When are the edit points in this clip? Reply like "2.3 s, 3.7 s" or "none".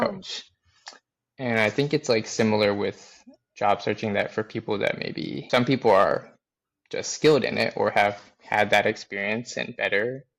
5.4 s